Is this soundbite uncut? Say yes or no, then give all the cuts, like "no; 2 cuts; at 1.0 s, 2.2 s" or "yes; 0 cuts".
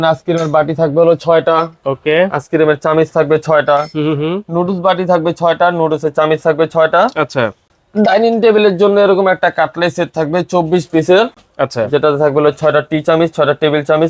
yes; 0 cuts